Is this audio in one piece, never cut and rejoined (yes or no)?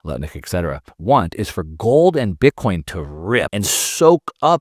no